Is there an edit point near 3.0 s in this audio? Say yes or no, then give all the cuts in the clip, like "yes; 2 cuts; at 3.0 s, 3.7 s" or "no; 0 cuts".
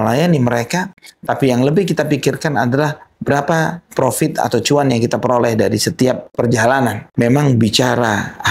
no; 1 cut; at 6.7 s